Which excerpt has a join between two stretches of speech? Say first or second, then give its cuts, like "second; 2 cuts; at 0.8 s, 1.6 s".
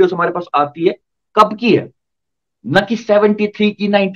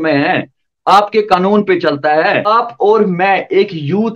second; 1 cut; at 2.5 s